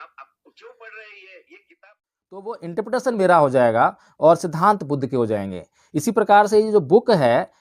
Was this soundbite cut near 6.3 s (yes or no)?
no